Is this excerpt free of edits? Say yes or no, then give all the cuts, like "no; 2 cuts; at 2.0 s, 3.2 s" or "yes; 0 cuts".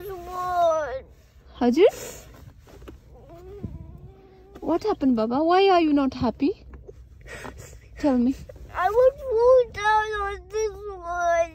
yes; 0 cuts